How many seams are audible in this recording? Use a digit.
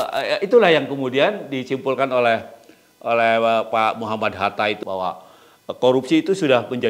1